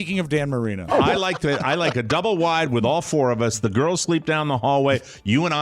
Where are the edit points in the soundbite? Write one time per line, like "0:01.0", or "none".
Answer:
0:00.9